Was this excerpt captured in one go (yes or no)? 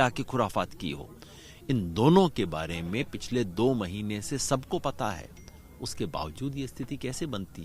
yes